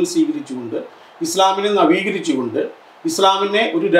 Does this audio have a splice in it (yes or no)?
no